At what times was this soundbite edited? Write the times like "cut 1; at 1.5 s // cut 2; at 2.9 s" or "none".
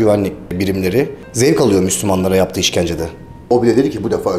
cut 1; at 3.5 s